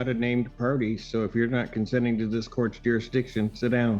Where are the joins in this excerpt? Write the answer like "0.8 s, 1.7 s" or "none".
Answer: none

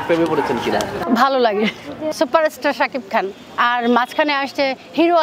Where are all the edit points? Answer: 1.0 s, 2.1 s

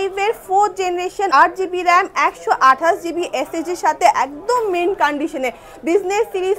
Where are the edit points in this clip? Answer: 1.3 s

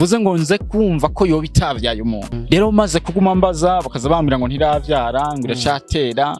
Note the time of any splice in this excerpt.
2.3 s

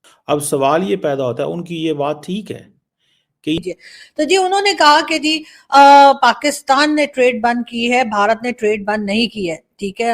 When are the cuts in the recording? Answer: 3.6 s

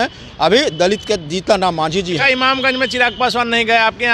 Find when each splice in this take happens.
2.2 s

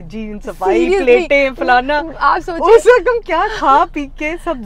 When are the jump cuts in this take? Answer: none

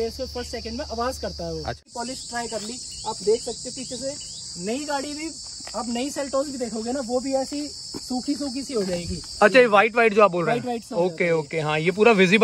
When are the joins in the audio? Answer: 1.9 s

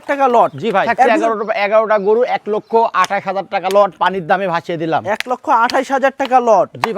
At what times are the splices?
1.2 s

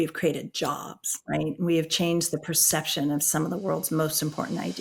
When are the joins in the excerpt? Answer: none

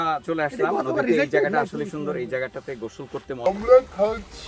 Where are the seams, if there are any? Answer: 3.5 s

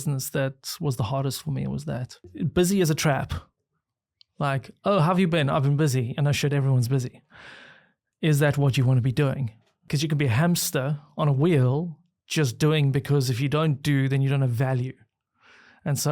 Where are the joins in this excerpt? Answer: 2.2 s, 9.8 s

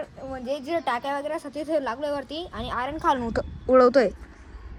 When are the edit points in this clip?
none

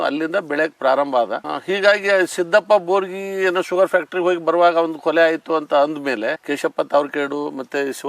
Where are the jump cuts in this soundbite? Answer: 1.4 s, 6.3 s

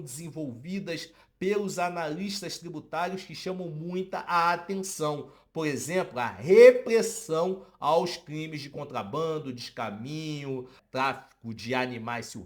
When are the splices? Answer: 10.8 s

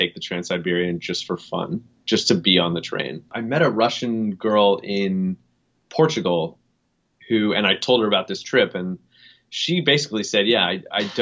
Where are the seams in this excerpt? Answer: 3.4 s

